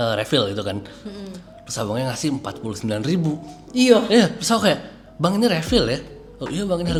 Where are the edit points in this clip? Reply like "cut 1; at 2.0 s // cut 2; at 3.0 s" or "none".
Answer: none